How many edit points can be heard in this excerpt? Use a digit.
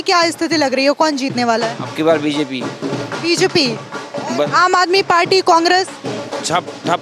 0